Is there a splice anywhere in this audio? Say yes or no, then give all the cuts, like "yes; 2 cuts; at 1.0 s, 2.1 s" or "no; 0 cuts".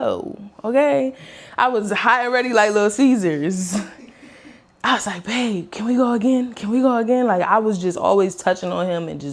no; 0 cuts